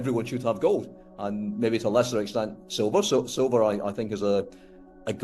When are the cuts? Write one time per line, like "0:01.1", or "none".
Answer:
none